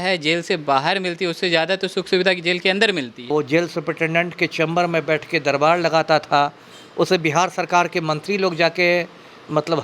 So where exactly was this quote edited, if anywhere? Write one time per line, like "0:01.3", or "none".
0:03.3